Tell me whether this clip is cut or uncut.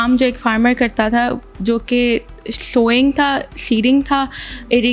uncut